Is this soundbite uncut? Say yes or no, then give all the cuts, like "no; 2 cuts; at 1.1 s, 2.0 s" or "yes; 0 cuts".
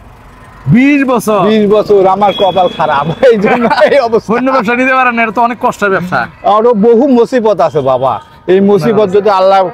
yes; 0 cuts